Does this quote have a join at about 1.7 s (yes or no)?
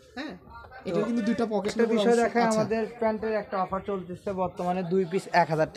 yes